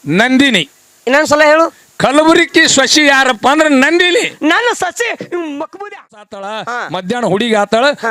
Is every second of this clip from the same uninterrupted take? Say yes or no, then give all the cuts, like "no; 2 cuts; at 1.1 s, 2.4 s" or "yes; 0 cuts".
no; 1 cut; at 6.5 s